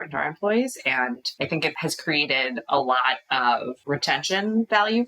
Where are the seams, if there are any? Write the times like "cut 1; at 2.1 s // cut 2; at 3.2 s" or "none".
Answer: cut 1; at 1.5 s // cut 2; at 3.7 s